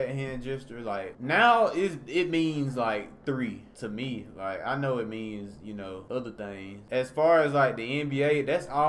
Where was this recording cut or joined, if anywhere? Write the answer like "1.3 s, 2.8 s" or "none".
1.1 s, 3.7 s, 6.0 s, 6.7 s